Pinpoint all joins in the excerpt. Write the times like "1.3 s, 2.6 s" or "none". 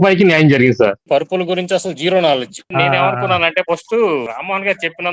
1.0 s, 2.7 s, 4.3 s

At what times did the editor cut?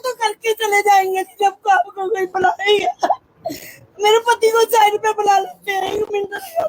none

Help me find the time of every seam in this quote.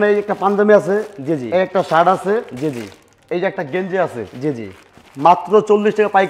none

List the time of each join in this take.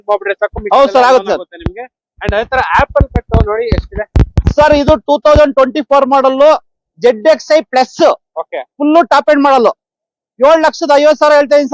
none

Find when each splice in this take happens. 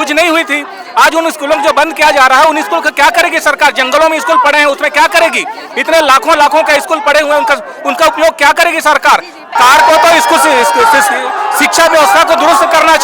9.6 s

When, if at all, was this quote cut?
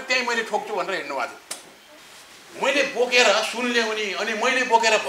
1.8 s

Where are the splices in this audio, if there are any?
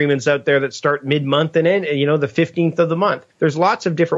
3.3 s

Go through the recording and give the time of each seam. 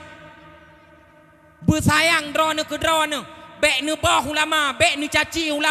none

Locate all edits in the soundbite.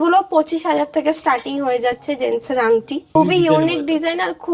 3.1 s

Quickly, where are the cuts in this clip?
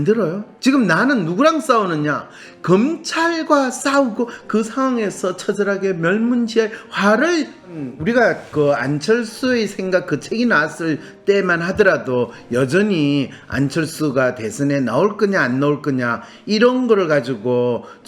7.9 s

